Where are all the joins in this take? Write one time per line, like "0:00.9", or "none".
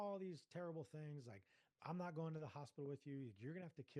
none

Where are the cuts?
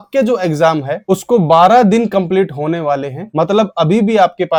none

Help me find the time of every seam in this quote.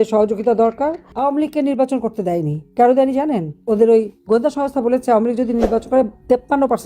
0:01.0

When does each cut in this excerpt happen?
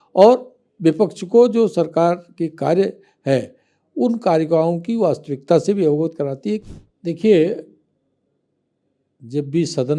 0:06.6

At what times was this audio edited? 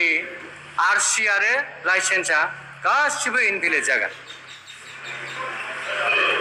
none

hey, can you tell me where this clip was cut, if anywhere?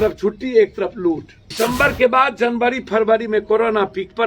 0:01.4

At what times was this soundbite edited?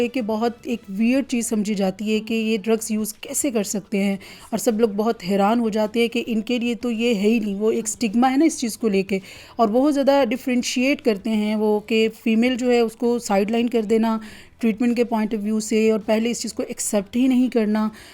none

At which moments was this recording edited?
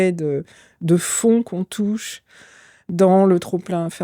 none

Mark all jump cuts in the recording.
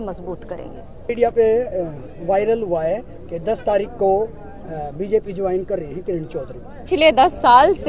0:01.1
0:06.8

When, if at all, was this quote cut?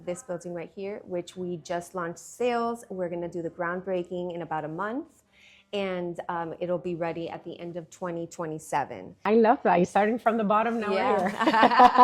0:09.2

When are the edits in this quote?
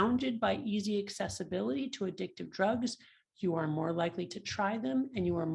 none

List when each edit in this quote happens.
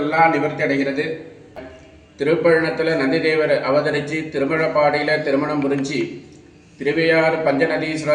0:01.6

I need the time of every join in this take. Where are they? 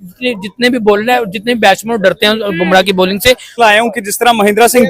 0:03.5

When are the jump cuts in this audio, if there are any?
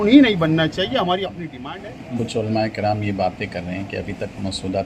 0:01.5

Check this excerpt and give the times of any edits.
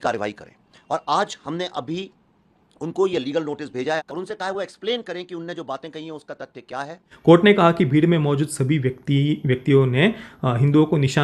0:07.1

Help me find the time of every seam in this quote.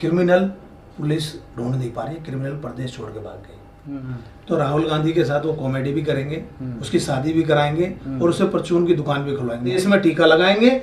0:04.1
0:09.8

